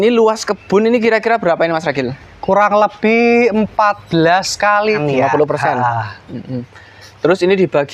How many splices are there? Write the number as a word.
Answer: one